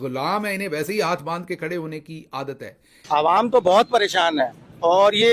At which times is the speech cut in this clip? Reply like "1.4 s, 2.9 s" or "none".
3.1 s

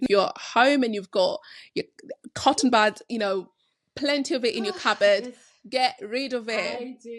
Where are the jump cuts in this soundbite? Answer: none

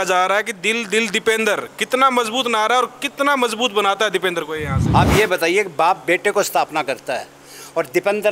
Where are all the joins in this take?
4.8 s

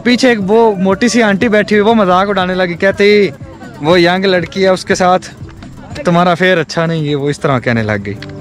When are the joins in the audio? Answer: none

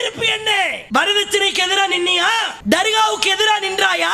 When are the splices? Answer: none

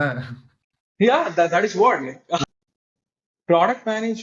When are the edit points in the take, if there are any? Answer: 2.4 s

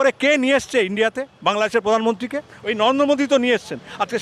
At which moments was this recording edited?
none

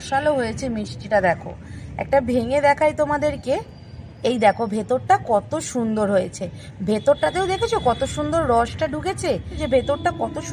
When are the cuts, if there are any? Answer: 9.5 s

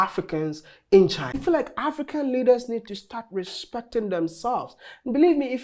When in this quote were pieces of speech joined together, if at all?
1.4 s

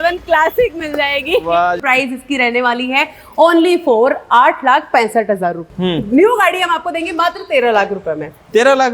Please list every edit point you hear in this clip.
1.8 s, 5.7 s

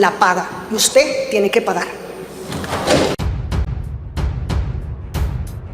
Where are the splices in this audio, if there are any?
3.1 s

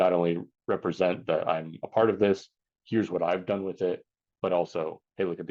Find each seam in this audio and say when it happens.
none

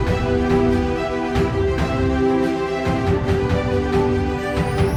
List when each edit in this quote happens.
none

